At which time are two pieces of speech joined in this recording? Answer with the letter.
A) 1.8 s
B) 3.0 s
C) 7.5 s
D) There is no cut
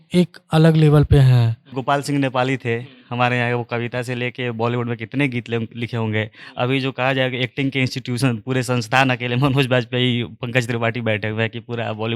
A